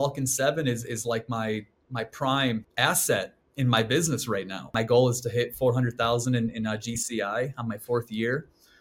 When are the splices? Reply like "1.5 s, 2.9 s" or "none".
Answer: 2.7 s, 4.7 s

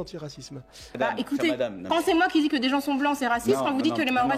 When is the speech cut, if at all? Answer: 0.9 s

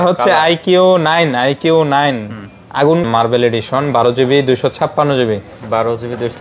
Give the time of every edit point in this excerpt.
3.0 s

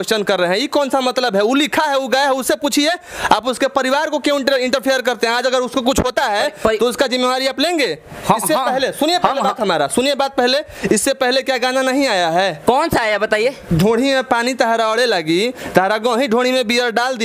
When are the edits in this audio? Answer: none

